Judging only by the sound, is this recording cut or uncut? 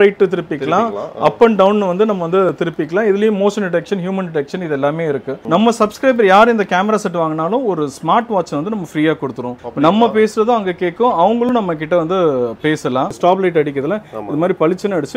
cut